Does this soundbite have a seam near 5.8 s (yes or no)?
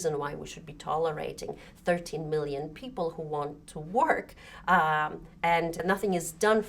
yes